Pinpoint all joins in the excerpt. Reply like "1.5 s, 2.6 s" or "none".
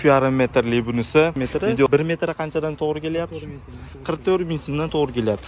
1.9 s